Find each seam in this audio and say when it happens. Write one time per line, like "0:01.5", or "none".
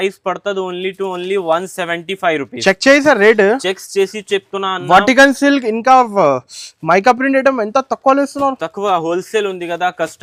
none